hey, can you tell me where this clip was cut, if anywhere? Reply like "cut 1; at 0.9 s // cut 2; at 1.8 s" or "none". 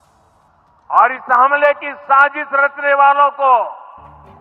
none